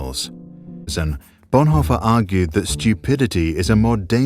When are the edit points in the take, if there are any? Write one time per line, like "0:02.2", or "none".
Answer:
0:00.9